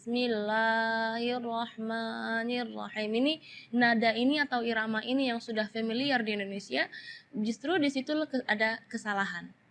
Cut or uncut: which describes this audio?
uncut